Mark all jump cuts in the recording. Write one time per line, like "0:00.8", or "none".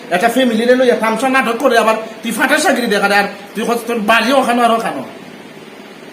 none